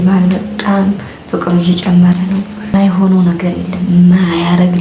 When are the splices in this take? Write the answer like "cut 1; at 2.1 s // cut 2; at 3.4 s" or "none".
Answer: cut 1; at 2.7 s